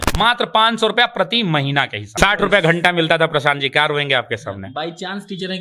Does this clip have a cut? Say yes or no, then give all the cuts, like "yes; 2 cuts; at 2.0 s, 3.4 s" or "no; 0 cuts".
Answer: yes; 1 cut; at 2.1 s